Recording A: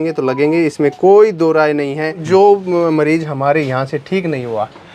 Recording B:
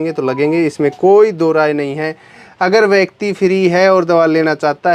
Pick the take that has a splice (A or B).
A